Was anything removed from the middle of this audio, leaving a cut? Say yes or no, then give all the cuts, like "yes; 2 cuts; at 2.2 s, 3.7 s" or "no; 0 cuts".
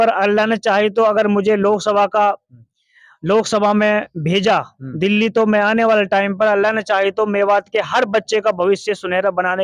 no; 0 cuts